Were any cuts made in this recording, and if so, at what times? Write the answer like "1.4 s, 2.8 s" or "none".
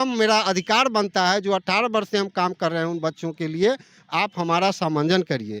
none